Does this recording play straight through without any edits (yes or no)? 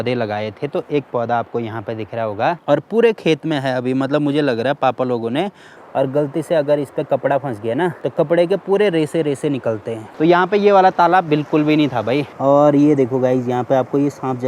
no